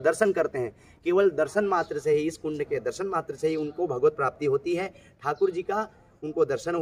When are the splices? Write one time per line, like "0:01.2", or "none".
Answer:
none